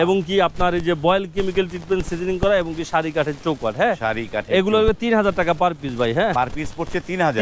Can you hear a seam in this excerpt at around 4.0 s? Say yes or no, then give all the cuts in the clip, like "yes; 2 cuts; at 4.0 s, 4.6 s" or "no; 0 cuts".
no; 0 cuts